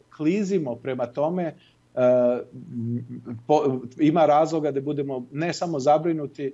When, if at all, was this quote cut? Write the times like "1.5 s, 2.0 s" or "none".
none